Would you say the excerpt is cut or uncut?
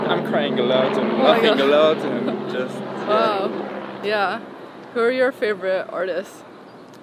uncut